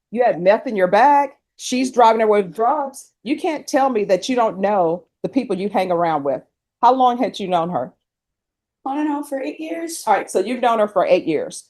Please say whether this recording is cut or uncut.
uncut